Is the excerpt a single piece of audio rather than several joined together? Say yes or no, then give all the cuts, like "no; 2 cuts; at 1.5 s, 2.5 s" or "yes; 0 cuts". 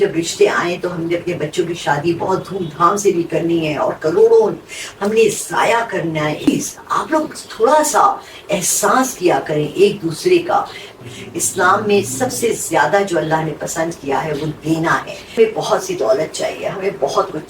no; 3 cuts; at 6.5 s, 10.9 s, 15.2 s